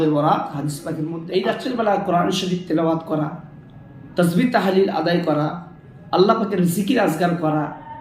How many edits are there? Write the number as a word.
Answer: one